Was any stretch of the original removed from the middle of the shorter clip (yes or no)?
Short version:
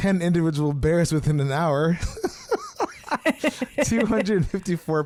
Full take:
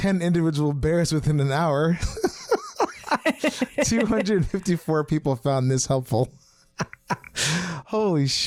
no